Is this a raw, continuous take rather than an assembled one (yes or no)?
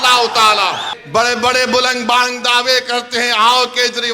no